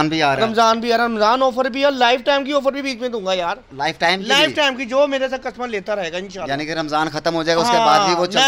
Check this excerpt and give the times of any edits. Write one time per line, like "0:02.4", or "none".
none